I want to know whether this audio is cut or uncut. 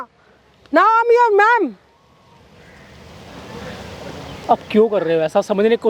uncut